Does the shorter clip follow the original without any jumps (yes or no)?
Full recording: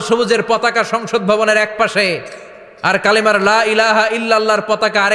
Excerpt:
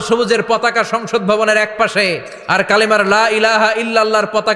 no